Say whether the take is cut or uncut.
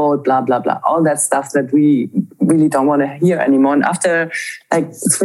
uncut